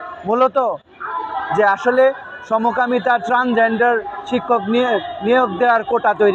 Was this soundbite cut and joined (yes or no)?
no